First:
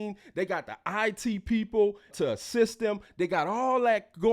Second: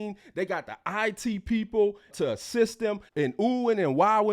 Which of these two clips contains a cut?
second; 1 cut; at 3.1 s

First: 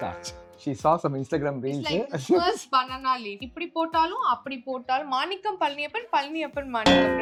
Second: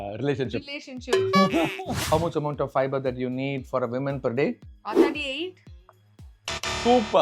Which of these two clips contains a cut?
second; 1 cut; at 1.9 s

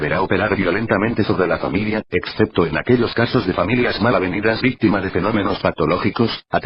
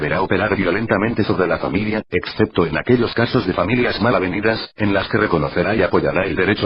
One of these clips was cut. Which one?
second; 1 cut; at 4.6 s

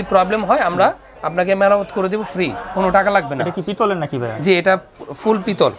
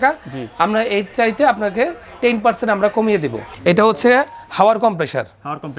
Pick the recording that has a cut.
second; 1 cut; at 3.5 s

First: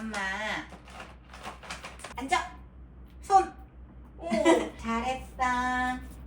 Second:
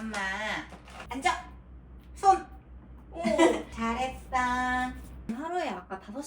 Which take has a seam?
second; 2 cuts; at 1.0 s, 5.3 s

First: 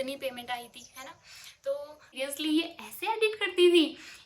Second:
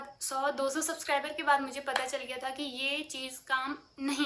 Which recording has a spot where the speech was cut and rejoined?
first; 1 cut; at 2.2 s

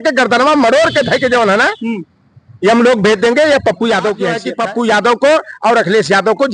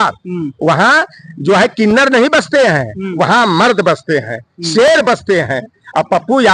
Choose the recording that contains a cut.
first; 1 cut; at 4.5 s

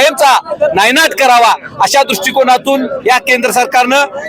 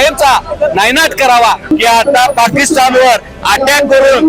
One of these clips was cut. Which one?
second; 1 cut; at 1.7 s

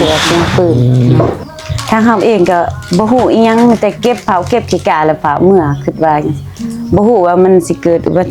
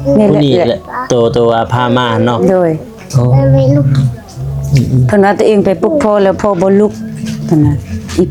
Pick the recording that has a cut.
first; 1 cut; at 1.1 s

